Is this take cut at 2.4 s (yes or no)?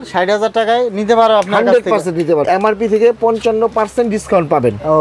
yes